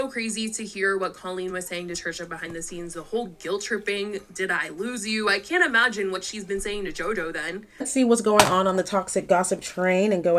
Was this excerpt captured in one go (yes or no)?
no